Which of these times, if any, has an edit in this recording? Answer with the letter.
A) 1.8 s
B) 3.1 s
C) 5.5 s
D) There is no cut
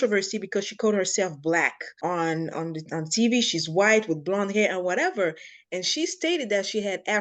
A